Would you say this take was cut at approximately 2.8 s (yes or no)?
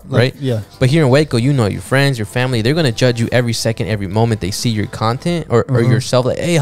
no